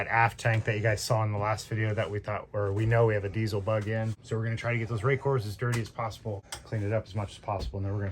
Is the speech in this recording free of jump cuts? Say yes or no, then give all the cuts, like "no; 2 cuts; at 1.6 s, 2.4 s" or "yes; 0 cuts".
no; 2 cuts; at 4.2 s, 6.5 s